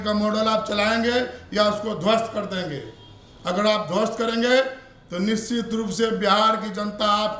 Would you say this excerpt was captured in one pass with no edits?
yes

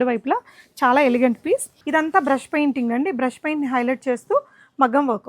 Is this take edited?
yes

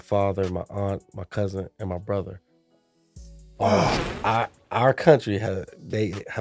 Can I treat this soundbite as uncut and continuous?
no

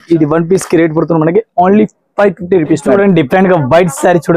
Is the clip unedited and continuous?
no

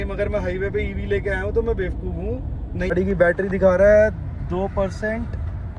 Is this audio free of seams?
no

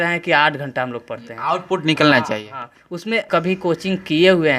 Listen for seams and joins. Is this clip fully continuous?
no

